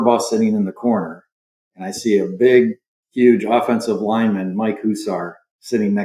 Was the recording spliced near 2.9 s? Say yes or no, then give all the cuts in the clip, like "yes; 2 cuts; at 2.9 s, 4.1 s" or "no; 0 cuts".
no; 0 cuts